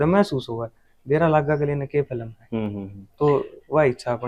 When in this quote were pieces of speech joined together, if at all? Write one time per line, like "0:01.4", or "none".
none